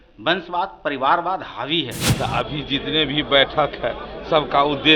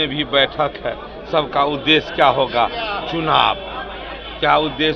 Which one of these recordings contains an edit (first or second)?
first